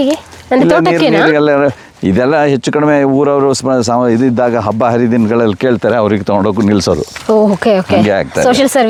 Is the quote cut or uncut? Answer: uncut